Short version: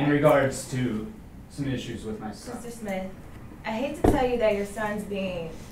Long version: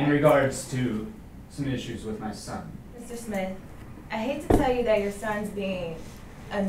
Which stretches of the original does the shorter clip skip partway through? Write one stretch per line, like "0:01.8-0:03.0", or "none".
0:02.5-0:02.9